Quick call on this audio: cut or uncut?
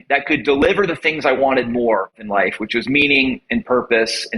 cut